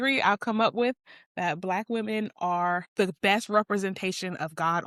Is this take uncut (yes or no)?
yes